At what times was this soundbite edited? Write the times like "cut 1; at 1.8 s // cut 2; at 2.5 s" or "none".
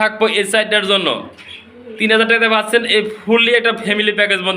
none